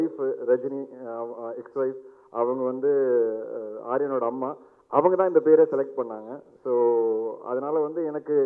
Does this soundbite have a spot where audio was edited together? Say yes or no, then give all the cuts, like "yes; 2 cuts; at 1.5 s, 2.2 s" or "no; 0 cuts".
no; 0 cuts